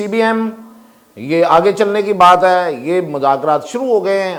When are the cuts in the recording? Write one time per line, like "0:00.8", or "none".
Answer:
none

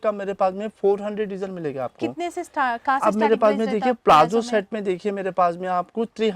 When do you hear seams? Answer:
none

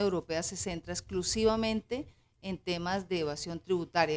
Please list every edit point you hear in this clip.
none

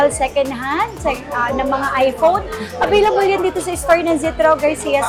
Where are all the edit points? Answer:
none

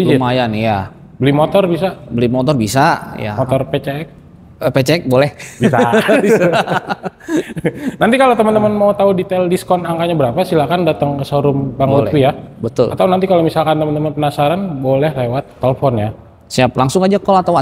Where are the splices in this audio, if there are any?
none

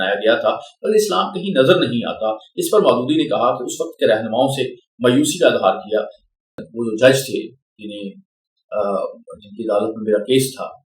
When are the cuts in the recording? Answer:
0:06.7

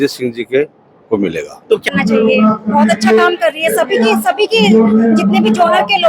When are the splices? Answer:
0:01.9

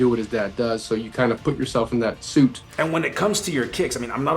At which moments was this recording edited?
0:02.7

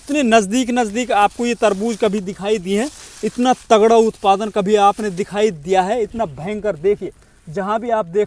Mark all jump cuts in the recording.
none

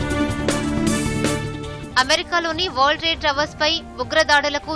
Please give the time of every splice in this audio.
0:01.5

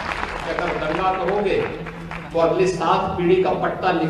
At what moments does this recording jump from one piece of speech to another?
none

